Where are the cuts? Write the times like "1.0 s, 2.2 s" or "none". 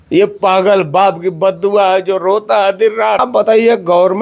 3.2 s

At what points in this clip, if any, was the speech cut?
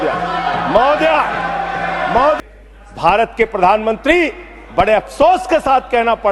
2.5 s

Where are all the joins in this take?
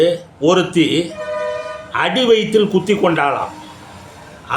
none

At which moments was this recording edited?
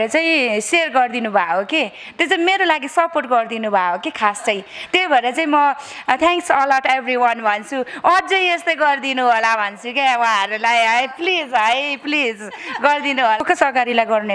13.4 s

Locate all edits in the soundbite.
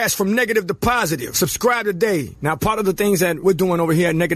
1.2 s

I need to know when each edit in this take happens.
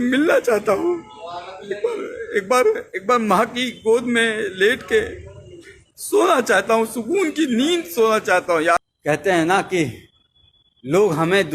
8.8 s

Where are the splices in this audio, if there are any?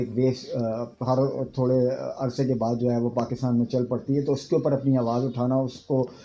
none

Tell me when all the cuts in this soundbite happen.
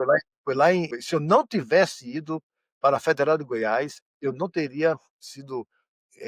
1.0 s

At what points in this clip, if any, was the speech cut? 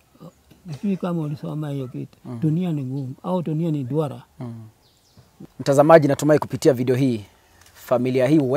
5.5 s

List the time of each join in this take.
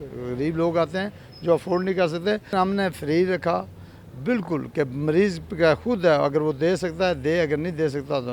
2.5 s

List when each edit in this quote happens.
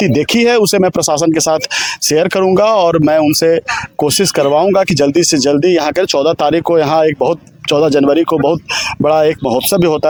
none

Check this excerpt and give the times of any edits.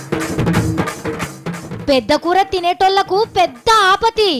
none

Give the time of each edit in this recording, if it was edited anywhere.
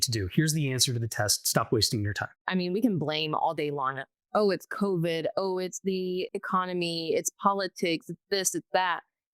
2.4 s, 6.3 s

